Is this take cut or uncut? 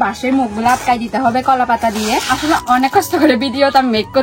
cut